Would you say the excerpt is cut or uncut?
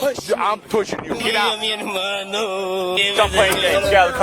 cut